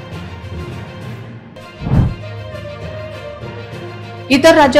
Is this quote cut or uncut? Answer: uncut